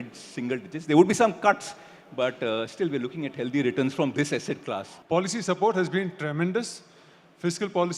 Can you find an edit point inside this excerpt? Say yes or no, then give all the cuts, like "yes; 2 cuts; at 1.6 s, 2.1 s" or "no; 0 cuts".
yes; 1 cut; at 4.9 s